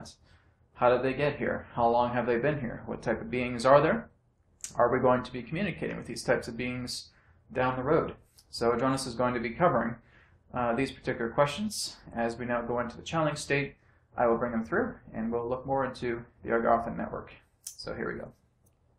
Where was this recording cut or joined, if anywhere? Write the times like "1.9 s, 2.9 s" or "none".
15.3 s